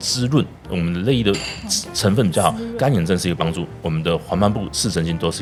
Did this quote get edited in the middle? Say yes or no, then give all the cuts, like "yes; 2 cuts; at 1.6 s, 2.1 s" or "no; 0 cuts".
no; 0 cuts